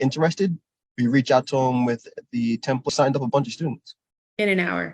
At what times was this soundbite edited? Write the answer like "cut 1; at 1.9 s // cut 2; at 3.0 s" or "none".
cut 1; at 2.9 s